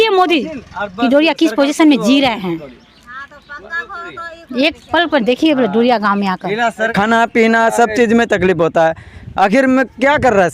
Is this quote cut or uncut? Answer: cut